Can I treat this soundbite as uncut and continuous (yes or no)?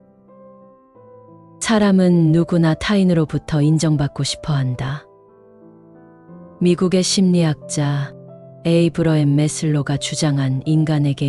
no